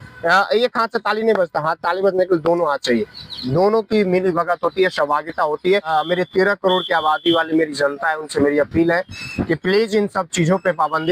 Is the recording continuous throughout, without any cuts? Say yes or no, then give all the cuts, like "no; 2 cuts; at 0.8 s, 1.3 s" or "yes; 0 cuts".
no; 1 cut; at 5.9 s